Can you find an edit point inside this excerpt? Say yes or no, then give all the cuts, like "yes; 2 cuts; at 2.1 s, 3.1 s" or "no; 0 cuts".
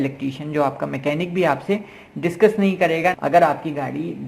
yes; 1 cut; at 3.2 s